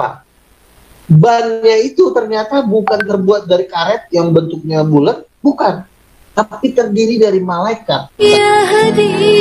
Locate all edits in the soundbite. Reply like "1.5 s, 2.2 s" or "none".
8.1 s

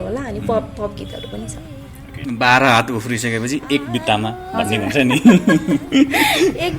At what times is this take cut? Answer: 2.1 s

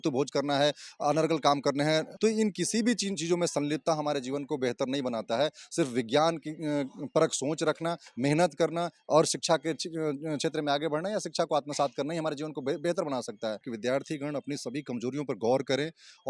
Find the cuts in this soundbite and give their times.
2.1 s, 13.7 s

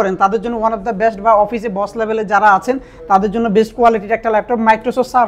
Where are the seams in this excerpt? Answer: none

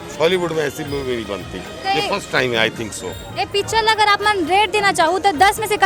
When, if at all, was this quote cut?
none

